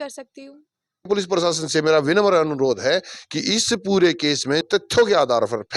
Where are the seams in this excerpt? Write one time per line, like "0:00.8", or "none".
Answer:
0:01.1
0:04.6